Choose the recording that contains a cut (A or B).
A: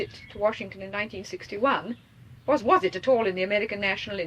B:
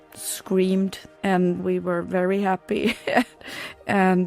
B